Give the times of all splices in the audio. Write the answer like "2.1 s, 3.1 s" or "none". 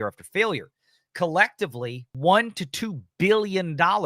2.1 s